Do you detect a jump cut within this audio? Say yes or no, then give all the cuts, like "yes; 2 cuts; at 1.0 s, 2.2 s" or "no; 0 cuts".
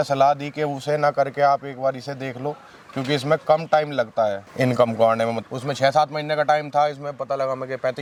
no; 0 cuts